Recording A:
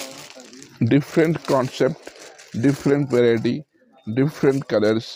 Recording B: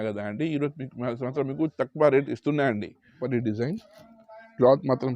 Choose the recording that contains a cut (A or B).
B